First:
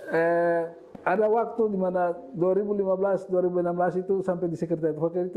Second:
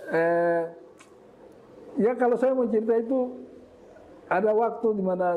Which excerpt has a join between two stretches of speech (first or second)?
first